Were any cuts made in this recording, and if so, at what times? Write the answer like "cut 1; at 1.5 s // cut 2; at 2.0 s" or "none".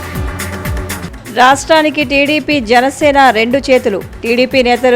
cut 1; at 1.1 s